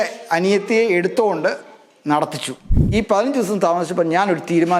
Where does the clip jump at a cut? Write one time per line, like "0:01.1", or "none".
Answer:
0:02.8